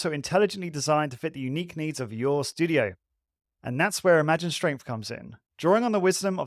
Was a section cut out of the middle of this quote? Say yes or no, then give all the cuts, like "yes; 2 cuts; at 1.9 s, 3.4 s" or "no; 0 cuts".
no; 0 cuts